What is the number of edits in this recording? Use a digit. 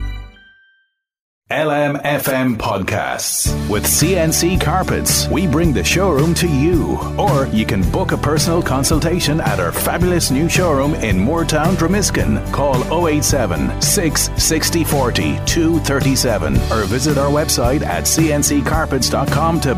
1